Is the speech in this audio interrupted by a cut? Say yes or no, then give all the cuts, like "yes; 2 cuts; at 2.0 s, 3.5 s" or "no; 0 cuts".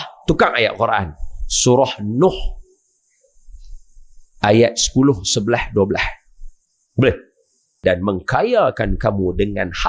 yes; 1 cut; at 7.8 s